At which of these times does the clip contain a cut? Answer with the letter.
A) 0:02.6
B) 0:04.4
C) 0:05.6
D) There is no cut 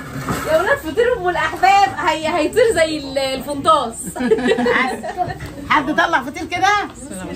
D